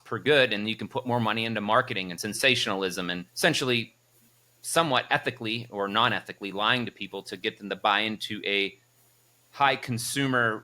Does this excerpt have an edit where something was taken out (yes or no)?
yes